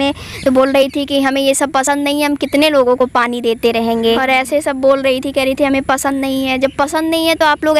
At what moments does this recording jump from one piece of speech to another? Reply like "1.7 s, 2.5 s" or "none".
none